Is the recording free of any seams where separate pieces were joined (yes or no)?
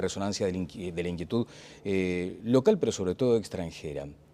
no